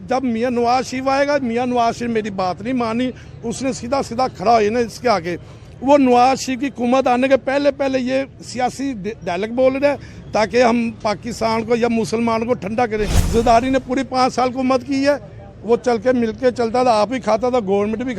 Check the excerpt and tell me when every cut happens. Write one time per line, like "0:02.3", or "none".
0:13.2